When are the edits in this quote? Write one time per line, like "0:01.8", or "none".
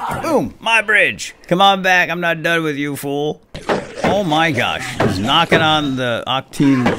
0:01.4
0:03.6